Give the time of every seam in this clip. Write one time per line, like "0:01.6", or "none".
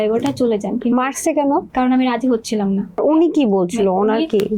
0:01.7
0:03.0